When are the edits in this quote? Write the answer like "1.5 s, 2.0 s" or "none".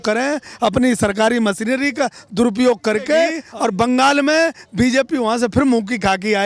3.4 s